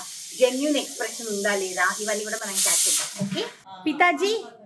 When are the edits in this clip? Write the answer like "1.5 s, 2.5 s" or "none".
3.5 s